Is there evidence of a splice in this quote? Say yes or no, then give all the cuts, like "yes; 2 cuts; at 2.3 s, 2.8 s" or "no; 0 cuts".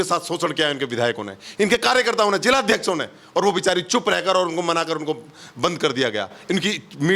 no; 0 cuts